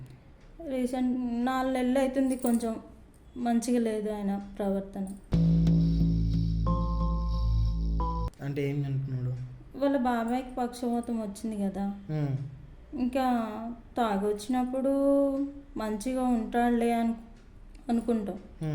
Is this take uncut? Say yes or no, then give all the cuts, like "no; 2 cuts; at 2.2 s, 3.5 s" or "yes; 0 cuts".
yes; 0 cuts